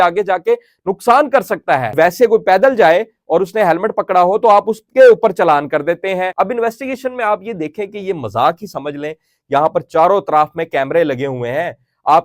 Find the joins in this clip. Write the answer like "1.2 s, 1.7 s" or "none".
1.9 s, 6.3 s, 9.3 s